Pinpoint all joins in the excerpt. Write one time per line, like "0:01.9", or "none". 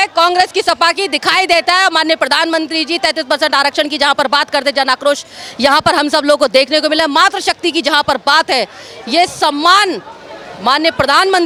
none